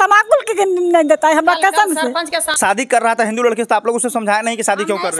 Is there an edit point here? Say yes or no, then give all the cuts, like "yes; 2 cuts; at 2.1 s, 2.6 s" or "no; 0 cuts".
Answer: yes; 1 cut; at 2.5 s